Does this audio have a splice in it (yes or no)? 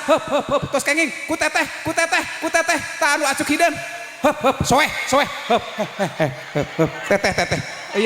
no